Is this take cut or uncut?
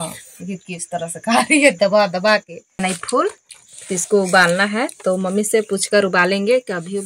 cut